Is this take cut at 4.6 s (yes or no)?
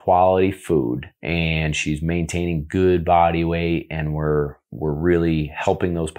no